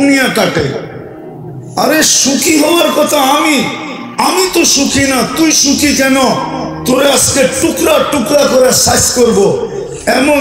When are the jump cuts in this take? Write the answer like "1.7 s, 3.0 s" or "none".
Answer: none